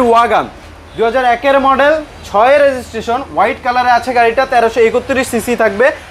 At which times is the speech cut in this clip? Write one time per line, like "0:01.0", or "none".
none